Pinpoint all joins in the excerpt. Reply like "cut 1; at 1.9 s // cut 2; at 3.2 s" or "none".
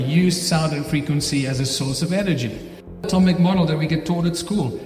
cut 1; at 3.1 s